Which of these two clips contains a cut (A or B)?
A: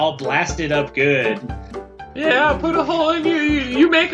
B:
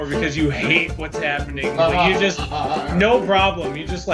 A